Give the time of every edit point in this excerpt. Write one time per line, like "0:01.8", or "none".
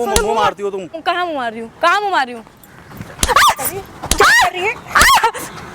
0:01.0